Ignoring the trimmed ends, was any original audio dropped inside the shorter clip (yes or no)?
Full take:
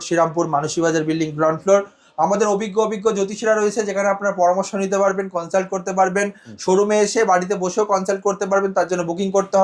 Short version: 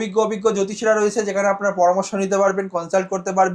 no